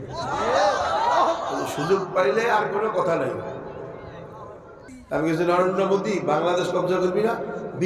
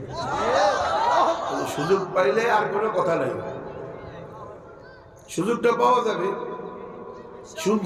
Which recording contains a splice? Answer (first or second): first